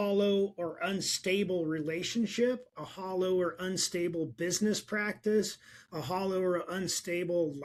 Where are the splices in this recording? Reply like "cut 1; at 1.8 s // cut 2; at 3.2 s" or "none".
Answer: none